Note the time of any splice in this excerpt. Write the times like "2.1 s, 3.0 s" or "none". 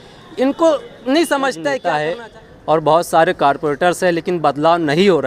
1.7 s